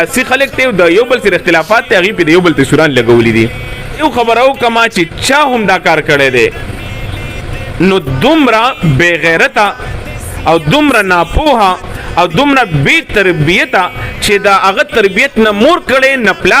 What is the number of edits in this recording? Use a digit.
1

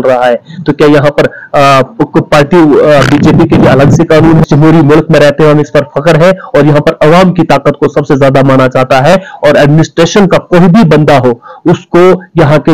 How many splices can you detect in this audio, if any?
1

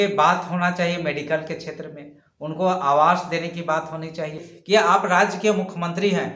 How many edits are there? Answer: 1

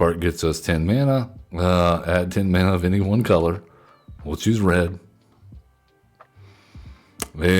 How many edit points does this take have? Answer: 1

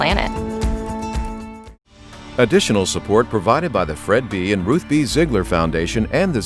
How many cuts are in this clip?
1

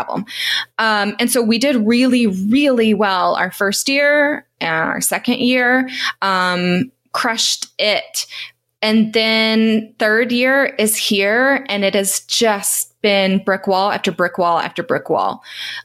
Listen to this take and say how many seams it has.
0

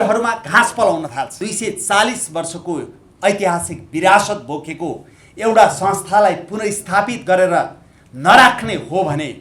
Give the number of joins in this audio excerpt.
1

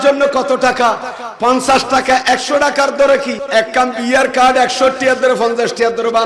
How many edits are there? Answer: 1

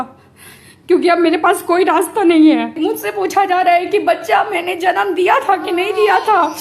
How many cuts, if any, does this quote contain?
1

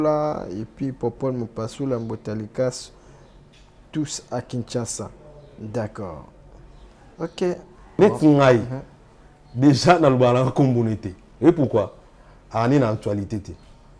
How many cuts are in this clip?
1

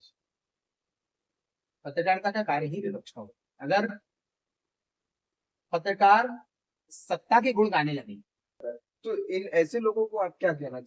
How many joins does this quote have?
1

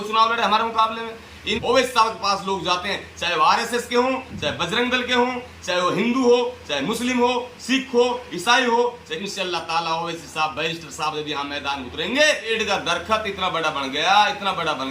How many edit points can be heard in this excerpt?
3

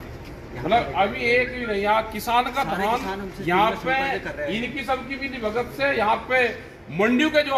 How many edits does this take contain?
0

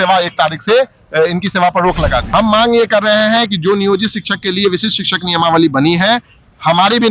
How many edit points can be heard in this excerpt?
1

